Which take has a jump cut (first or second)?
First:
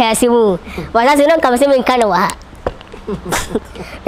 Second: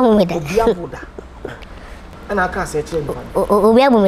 second